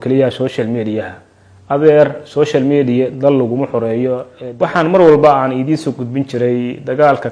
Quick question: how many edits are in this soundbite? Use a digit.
1